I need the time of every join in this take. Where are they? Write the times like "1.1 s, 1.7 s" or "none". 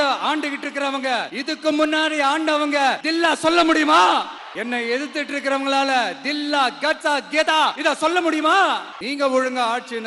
none